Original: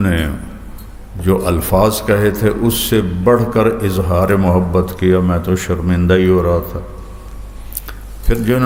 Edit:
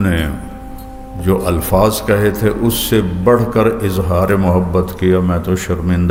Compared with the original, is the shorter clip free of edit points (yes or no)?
yes